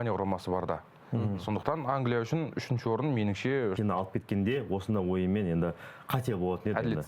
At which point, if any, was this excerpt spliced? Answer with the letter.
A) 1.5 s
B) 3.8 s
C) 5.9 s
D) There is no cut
B